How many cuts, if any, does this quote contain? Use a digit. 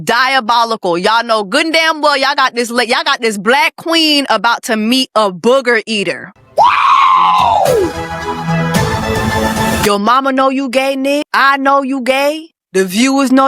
4